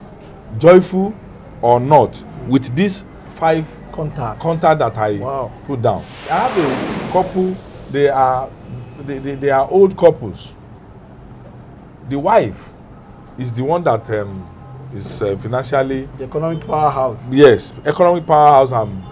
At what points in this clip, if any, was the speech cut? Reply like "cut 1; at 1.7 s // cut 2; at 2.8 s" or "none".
cut 1; at 6.2 s